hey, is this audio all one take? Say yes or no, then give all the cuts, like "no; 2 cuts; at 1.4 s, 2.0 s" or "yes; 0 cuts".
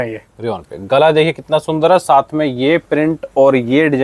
yes; 0 cuts